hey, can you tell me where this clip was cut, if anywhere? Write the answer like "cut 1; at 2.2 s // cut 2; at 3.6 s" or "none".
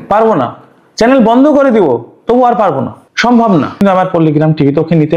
cut 1; at 3.0 s // cut 2; at 3.8 s